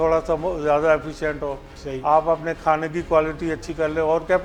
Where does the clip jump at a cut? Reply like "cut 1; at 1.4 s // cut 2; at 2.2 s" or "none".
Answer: none